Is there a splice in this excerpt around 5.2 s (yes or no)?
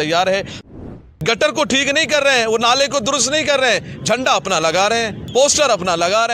yes